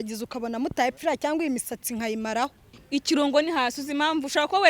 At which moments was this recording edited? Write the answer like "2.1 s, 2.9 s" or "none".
2.7 s